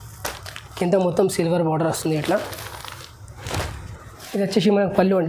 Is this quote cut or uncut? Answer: uncut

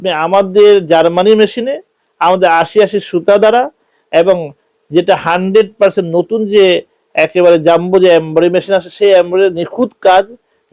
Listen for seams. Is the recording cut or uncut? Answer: uncut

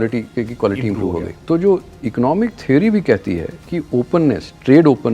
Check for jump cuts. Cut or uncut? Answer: cut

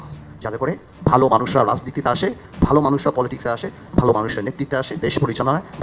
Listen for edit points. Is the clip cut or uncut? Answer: uncut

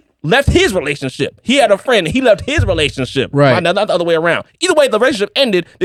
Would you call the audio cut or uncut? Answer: uncut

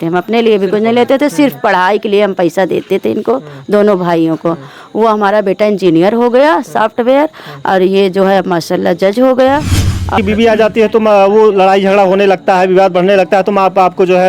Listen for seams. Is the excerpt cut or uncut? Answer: cut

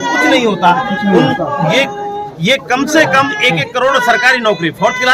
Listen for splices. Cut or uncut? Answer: uncut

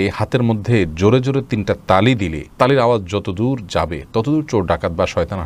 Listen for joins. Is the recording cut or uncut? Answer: uncut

